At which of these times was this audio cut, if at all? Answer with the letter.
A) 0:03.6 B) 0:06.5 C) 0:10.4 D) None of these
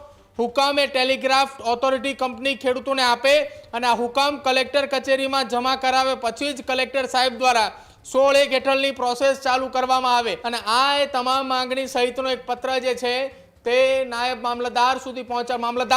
C